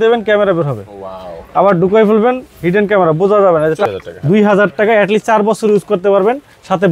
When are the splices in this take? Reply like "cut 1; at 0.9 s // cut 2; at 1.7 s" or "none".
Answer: cut 1; at 3.8 s